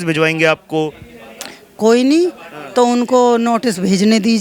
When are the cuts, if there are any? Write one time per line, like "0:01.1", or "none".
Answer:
none